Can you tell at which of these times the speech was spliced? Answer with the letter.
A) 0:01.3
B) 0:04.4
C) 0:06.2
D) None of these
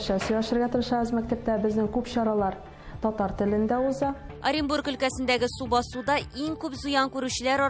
B